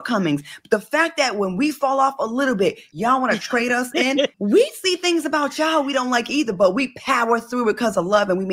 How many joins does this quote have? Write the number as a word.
two